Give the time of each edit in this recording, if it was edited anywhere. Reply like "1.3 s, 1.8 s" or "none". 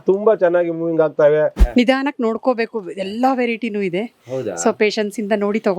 1.6 s